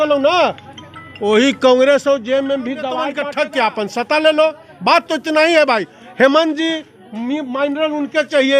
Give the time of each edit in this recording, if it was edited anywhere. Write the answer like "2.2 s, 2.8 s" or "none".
3.1 s